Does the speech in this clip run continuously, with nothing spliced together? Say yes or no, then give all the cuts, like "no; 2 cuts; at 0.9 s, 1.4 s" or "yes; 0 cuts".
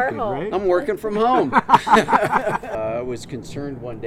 no; 1 cut; at 2.8 s